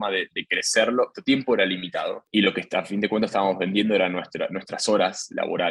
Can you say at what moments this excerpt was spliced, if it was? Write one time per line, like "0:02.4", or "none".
0:01.2
0:02.2